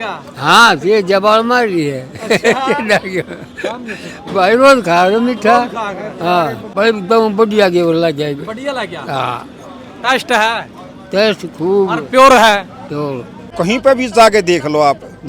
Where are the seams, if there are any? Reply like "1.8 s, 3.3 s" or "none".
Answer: 6.6 s, 13.5 s